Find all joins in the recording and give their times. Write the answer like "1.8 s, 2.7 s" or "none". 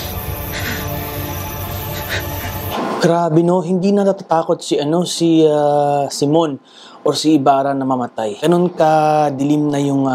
8.4 s